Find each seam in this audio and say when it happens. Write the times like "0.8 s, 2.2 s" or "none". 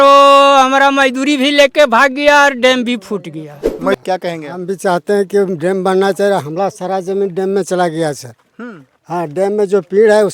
3.9 s